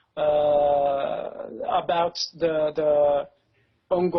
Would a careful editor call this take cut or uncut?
cut